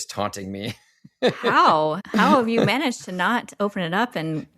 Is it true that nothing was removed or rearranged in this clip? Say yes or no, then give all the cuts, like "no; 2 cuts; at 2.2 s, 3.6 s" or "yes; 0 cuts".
no; 1 cut; at 2.0 s